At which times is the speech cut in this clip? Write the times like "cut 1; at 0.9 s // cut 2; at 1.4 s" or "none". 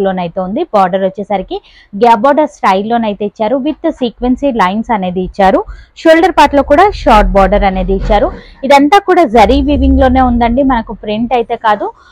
none